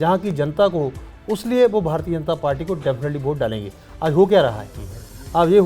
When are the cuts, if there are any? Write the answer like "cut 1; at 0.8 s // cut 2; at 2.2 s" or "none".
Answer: none